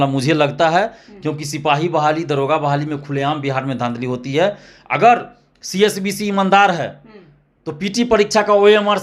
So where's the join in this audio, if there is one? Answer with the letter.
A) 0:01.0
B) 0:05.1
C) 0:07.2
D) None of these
D